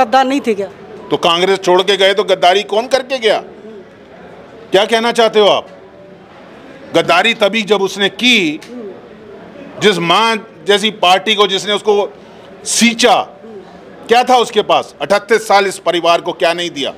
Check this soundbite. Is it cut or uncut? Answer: uncut